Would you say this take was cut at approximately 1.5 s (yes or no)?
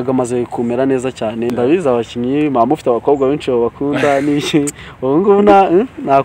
yes